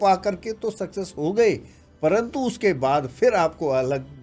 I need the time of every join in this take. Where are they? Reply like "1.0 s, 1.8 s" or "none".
none